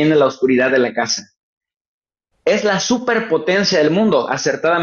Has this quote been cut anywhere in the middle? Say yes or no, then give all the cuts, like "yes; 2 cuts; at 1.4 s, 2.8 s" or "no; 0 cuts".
no; 0 cuts